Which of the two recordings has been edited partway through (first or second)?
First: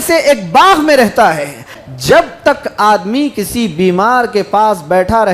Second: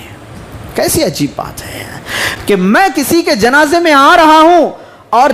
first